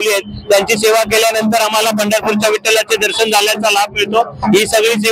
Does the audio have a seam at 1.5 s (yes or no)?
no